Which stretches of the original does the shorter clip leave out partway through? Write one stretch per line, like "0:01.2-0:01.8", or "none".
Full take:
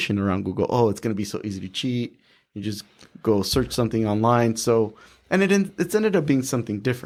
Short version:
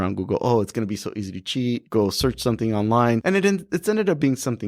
0:02.1-0:03.2
0:04.5-0:05.3